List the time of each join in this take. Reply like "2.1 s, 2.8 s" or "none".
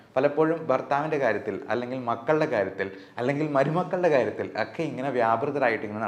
none

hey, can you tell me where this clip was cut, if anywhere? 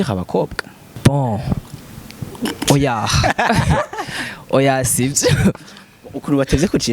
0.9 s

